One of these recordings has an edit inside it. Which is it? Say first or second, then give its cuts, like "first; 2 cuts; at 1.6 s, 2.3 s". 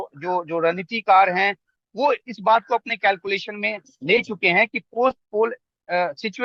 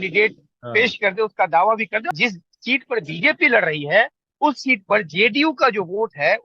second; 1 cut; at 2.1 s